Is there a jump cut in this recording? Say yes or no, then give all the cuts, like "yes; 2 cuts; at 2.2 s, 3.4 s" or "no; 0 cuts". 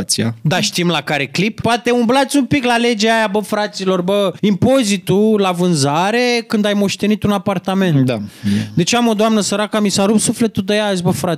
yes; 2 cuts; at 1.6 s, 4.4 s